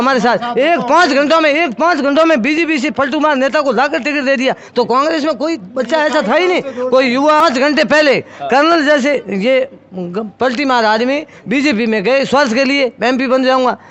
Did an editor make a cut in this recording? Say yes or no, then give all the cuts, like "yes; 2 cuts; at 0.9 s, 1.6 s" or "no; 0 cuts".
yes; 1 cut; at 7.4 s